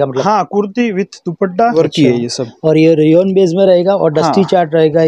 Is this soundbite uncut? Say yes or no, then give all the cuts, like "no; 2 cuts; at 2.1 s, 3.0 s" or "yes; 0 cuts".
no; 1 cut; at 1.7 s